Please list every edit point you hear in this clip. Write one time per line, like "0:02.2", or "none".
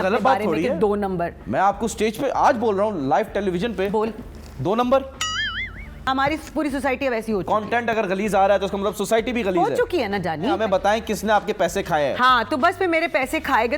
0:06.1
0:10.6